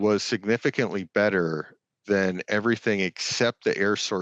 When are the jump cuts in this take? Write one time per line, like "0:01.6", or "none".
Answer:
none